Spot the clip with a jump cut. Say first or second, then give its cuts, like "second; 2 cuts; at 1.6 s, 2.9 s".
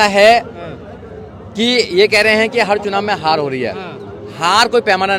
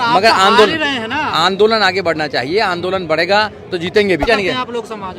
second; 1 cut; at 4.2 s